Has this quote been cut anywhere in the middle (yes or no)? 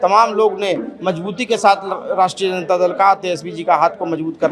no